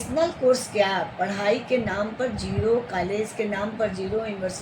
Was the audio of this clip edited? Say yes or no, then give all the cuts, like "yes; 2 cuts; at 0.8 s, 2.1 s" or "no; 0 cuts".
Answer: no; 0 cuts